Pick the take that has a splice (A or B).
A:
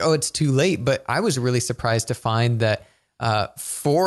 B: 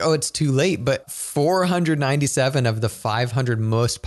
B